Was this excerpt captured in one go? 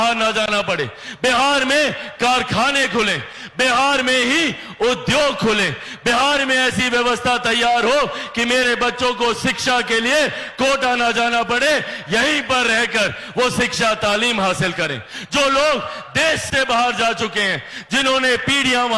yes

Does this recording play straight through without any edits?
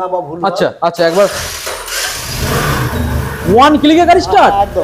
yes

